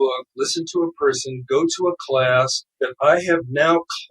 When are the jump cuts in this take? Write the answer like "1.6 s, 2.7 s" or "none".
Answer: 2.6 s